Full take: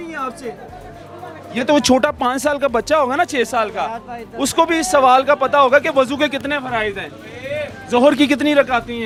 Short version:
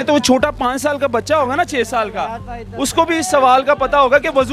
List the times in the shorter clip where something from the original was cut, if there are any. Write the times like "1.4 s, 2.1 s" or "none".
none